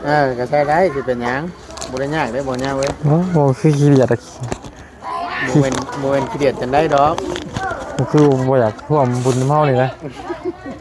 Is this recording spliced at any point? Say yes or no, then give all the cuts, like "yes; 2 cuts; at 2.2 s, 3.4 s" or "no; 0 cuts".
no; 0 cuts